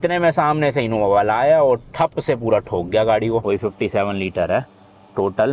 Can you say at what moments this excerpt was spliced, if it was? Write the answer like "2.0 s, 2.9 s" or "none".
3.4 s

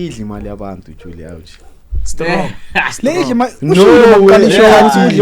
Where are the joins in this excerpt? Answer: none

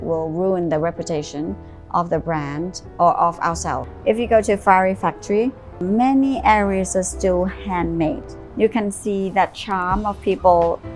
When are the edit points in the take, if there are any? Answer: 3.9 s, 5.8 s, 8.4 s

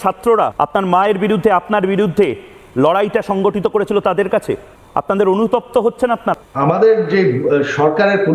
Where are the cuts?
6.3 s

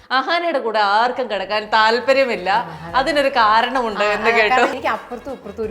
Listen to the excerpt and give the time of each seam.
4.8 s

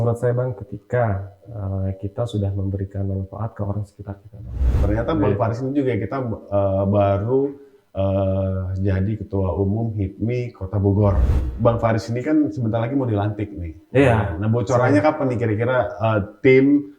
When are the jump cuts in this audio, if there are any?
4.8 s, 11.5 s

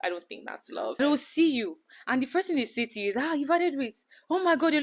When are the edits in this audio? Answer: 1.0 s

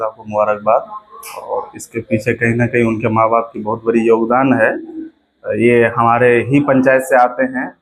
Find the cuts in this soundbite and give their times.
none

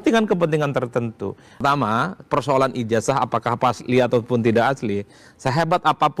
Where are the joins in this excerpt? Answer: 1.6 s

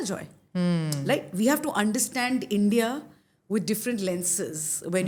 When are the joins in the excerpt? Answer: none

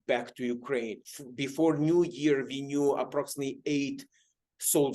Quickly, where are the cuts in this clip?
1.0 s

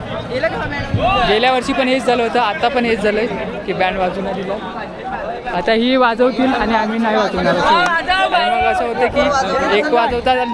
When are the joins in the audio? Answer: none

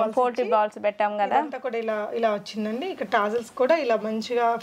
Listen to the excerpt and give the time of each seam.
none

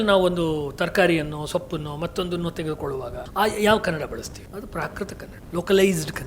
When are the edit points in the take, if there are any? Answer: 3.2 s, 4.4 s, 5.3 s

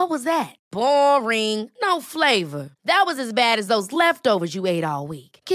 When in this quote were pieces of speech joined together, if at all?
none

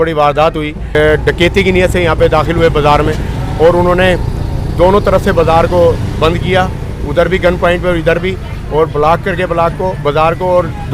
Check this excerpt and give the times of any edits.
1.0 s

